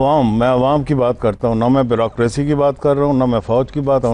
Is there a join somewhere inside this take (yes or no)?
no